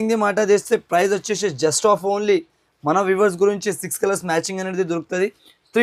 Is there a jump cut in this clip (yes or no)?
no